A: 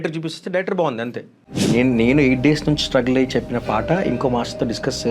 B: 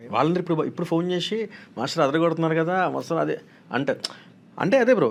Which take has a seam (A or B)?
A